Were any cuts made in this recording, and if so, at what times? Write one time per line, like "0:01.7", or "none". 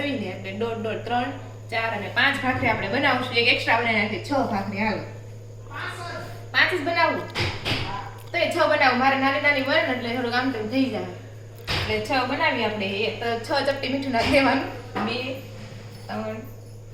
none